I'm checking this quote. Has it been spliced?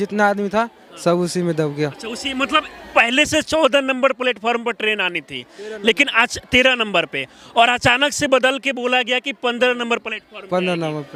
no; 0 cuts

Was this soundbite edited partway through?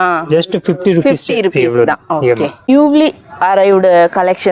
yes; 1 cut; at 2.7 s

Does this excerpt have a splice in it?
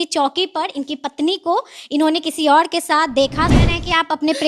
yes; 1 cut; at 3.5 s

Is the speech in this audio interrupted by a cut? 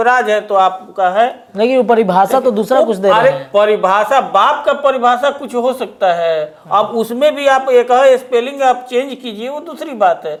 no; 0 cuts

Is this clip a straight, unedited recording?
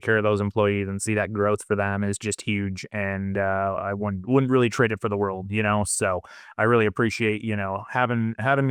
yes; 0 cuts

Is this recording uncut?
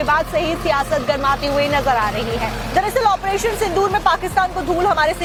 yes; 0 cuts

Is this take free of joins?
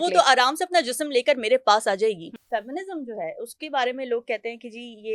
no; 1 cut; at 2.4 s

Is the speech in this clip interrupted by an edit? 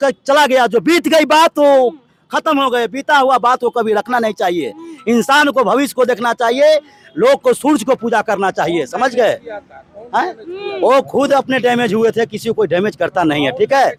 no; 0 cuts

